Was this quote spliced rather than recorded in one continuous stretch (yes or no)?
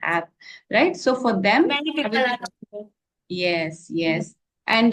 no